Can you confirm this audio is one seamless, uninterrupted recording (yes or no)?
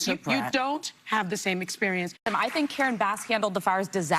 no